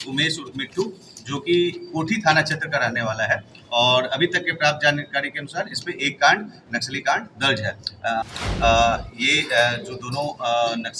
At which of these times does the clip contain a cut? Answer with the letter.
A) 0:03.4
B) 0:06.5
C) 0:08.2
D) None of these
C